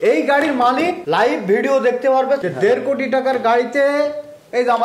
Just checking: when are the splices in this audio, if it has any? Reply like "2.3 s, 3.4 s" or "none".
2.4 s